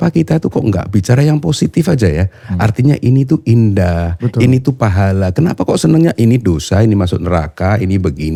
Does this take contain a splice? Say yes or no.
no